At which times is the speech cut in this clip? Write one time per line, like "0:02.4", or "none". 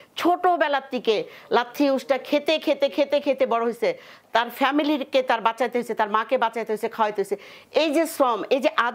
none